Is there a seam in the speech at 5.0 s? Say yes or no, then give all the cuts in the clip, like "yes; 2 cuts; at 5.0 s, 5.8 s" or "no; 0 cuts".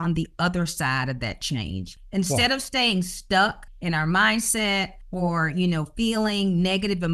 yes; 3 cuts; at 1.9 s, 3.7 s, 5.0 s